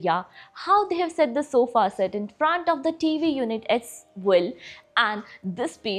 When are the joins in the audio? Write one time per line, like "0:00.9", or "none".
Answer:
none

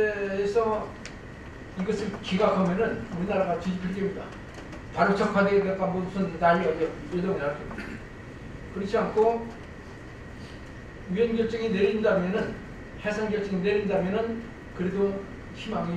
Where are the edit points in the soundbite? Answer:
none

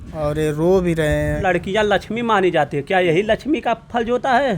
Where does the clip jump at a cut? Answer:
0:01.4

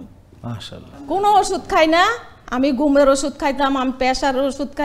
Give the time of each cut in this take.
0:00.9

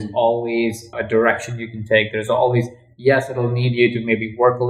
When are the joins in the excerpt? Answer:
0:00.9

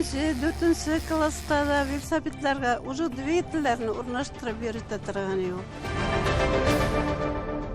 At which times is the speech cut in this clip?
0:05.7

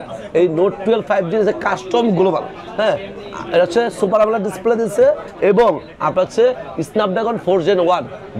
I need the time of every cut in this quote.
none

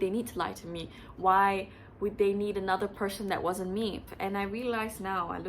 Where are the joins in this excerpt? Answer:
0:04.1

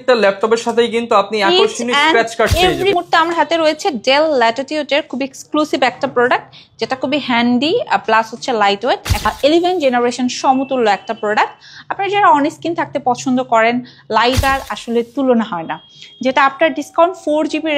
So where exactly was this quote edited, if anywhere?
0:02.9
0:09.3
0:14.4

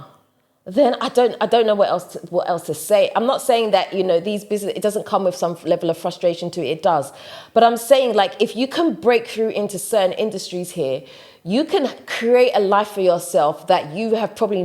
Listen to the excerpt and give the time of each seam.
none

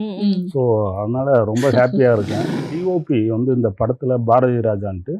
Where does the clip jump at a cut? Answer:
0:02.7

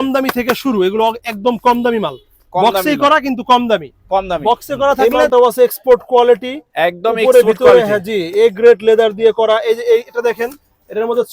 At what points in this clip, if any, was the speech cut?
0:05.2

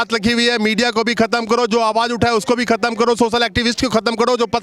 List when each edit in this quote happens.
none

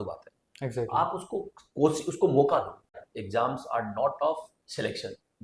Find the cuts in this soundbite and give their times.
0:02.8

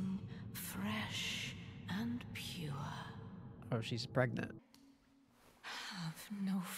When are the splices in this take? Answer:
0:04.6

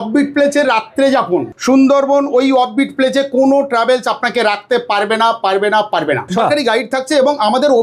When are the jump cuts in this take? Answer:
0:01.5
0:06.3

